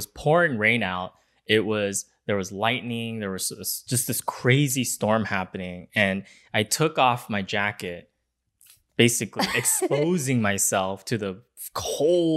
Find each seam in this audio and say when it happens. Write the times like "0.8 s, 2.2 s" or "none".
none